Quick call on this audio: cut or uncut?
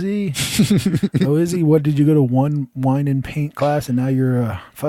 uncut